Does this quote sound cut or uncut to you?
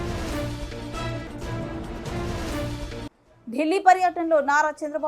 cut